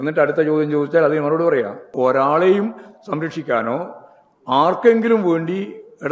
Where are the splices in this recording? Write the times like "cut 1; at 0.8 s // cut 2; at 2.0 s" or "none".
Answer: cut 1; at 1.9 s